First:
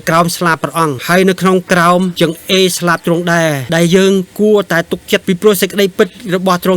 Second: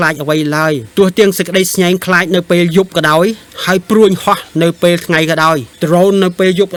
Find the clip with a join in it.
first; 3 cuts; at 1.0 s, 2.1 s, 3.6 s

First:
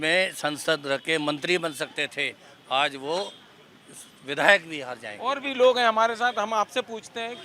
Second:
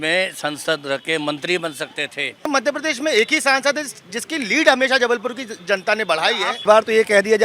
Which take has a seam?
second; 2 cuts; at 2.5 s, 6.6 s

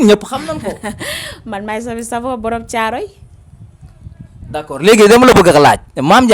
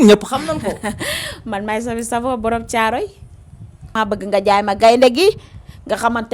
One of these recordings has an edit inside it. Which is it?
second; 1 cut; at 3.9 s

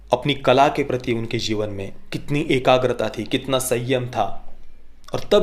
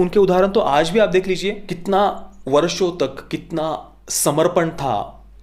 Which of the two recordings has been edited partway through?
second; 1 cut; at 1.7 s

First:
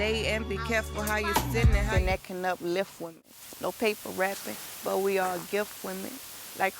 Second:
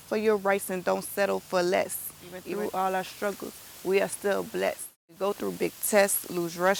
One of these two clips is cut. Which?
first; 1 cut; at 1.9 s

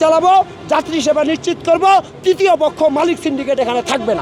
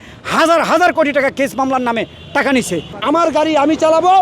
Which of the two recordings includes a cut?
second; 1 cut; at 2.9 s

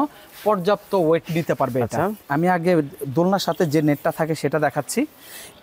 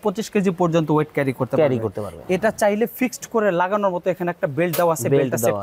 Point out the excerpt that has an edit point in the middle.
first; 1 cut; at 2.2 s

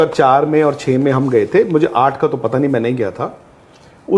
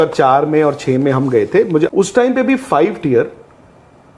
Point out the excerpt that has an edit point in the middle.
second; 1 cut; at 2.0 s

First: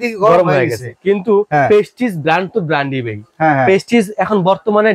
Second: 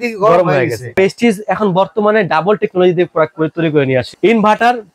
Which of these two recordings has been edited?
second; 2 cuts; at 1.0 s, 4.1 s

